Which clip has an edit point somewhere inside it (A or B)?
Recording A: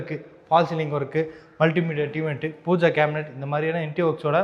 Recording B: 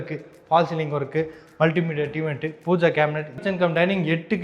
B